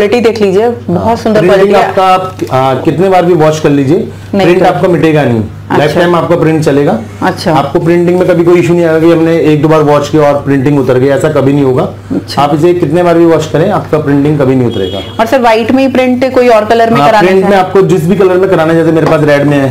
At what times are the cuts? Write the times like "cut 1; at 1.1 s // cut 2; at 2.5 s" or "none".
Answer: none

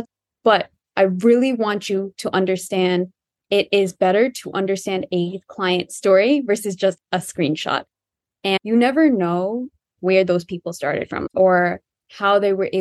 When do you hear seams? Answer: cut 1; at 8.6 s // cut 2; at 9.9 s // cut 3; at 11.2 s

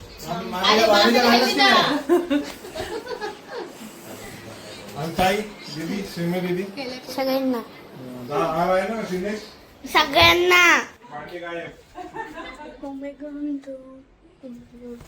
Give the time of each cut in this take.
cut 1; at 11.0 s

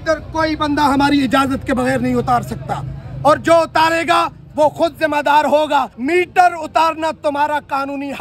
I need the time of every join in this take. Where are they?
none

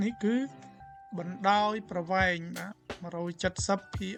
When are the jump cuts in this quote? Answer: none

